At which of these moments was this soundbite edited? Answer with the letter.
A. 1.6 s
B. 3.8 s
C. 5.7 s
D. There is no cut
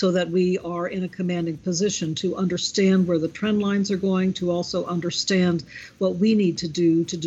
D